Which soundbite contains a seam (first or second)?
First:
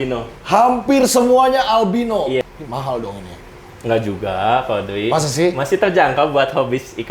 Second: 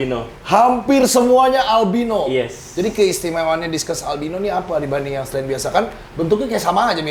first